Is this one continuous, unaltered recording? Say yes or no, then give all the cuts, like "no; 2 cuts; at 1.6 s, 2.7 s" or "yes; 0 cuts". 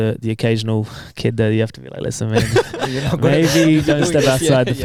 yes; 0 cuts